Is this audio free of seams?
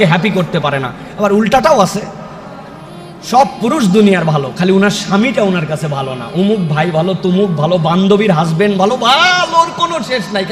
yes; 0 cuts

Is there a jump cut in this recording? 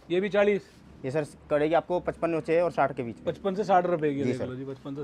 no; 0 cuts

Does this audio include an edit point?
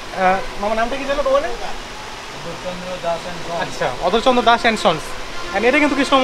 no; 0 cuts

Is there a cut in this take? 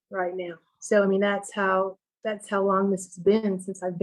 no; 0 cuts

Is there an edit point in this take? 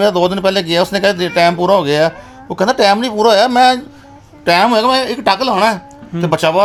no; 0 cuts

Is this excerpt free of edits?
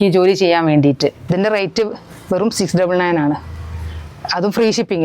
no; 1 cut; at 1.2 s

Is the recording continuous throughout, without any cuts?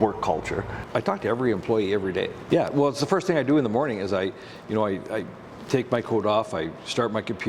no; 1 cut; at 2.4 s

